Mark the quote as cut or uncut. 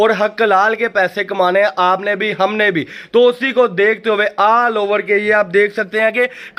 uncut